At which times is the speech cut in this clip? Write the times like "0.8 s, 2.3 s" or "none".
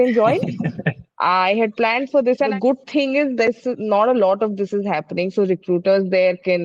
2.5 s